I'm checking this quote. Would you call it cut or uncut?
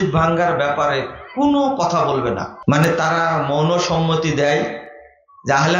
cut